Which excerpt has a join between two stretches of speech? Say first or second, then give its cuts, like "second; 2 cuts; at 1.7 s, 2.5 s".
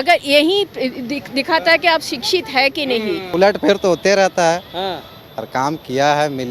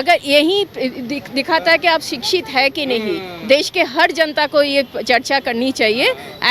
first; 1 cut; at 3.3 s